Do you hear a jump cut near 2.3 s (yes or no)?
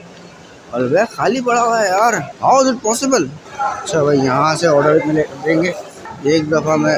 yes